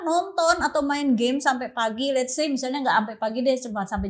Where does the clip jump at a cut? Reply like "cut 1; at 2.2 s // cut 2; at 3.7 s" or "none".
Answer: none